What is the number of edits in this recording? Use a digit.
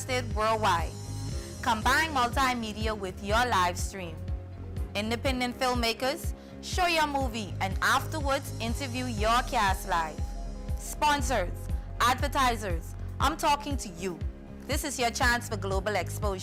0